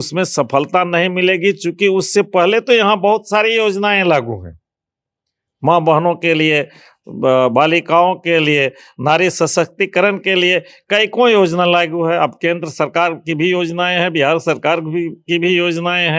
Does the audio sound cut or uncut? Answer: uncut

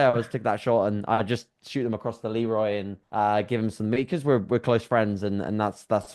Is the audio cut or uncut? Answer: uncut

